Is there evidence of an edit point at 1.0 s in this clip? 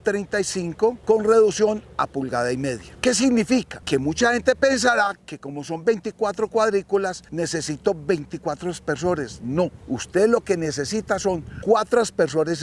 yes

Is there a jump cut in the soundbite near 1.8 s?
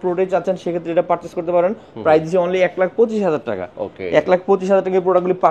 no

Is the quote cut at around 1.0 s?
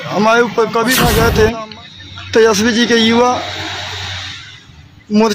yes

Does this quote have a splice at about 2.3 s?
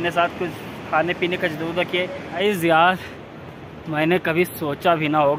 yes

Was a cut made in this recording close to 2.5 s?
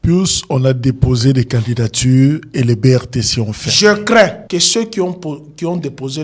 no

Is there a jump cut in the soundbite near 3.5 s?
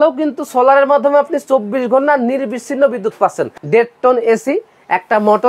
yes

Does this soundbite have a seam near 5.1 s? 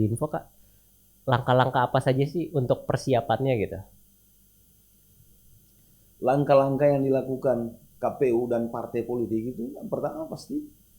yes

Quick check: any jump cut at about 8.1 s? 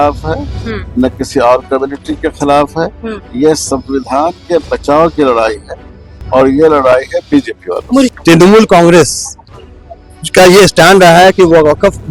yes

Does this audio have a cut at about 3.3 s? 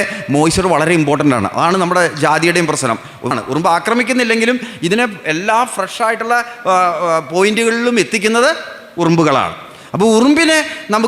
yes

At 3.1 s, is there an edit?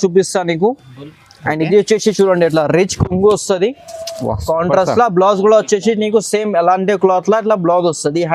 no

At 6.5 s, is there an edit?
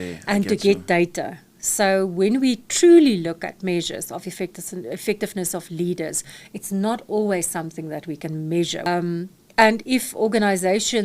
no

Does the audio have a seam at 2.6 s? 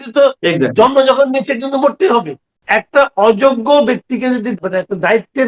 yes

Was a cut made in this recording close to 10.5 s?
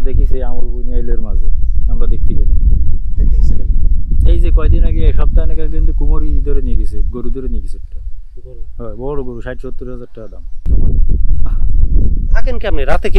yes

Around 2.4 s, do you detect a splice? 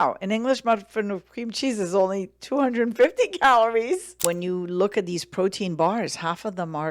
no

